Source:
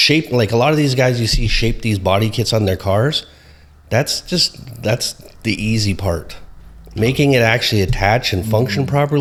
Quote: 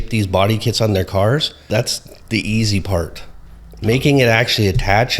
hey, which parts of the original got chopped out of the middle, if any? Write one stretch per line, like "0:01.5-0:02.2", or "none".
0:03.3-0:04.7

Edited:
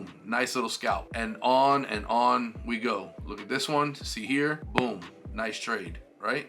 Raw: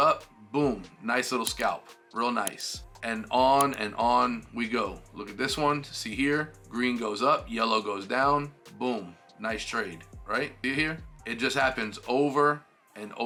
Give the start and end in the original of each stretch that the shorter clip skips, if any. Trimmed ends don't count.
0:01.8-0:03.0
0:06.5-0:08.7

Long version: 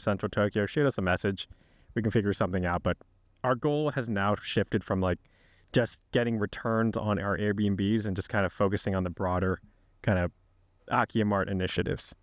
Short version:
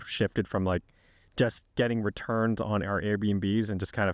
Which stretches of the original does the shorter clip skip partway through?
none

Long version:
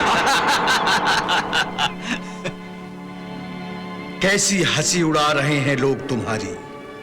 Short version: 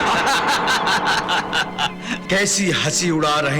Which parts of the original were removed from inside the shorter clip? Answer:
0:02.2-0:04.1

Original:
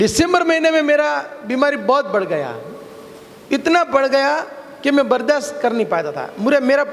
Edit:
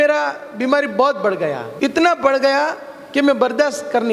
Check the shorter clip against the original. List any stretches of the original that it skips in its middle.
0:02.6-0:03.4

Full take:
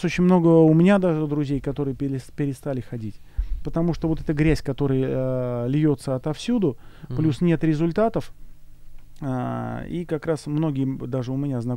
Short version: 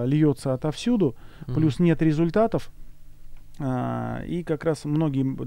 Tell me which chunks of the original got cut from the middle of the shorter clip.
none

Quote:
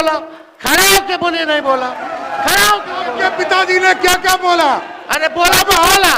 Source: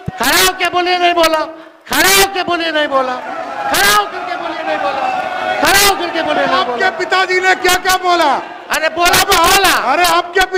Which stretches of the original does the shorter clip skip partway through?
0:04.4-0:06.7

